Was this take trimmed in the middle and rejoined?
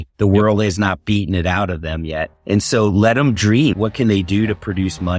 no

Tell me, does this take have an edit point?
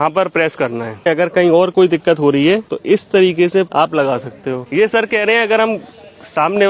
yes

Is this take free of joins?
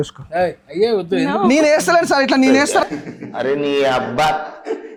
yes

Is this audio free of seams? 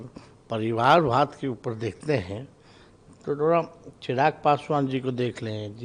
yes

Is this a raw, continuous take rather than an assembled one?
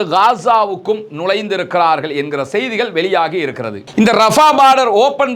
yes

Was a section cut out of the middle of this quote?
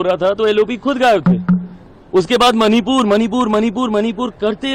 no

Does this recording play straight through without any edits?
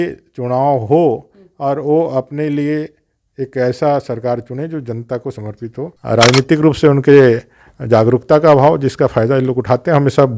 no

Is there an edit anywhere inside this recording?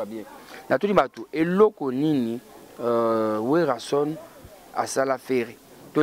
no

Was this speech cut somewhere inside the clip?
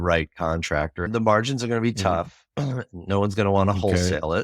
yes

